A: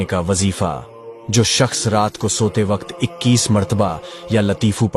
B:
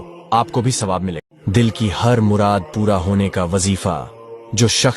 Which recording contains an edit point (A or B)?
B